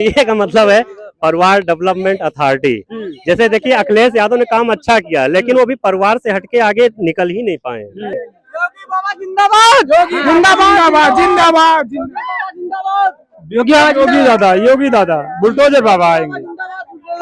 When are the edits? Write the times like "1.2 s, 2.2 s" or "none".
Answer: 8.1 s